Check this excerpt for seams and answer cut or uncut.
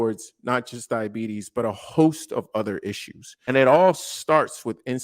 cut